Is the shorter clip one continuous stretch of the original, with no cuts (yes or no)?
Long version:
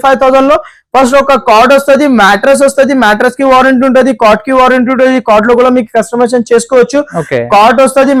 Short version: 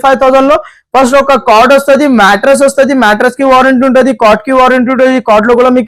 yes